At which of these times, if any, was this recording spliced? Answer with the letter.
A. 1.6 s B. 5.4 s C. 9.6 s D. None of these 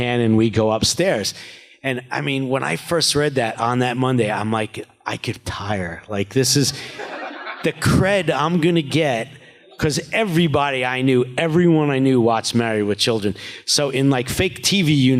B